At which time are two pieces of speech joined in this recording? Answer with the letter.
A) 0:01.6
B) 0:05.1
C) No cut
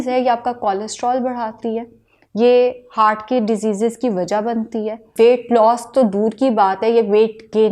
B